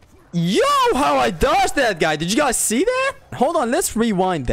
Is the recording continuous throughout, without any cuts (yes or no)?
no